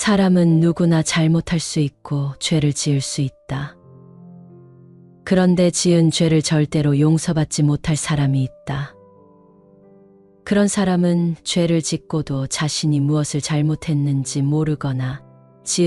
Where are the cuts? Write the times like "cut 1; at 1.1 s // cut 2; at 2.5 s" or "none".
cut 1; at 3.7 s // cut 2; at 5.2 s // cut 3; at 8.9 s // cut 4; at 10.4 s